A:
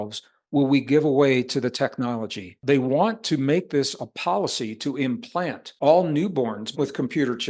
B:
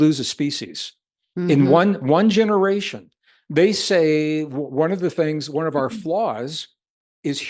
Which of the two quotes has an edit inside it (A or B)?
A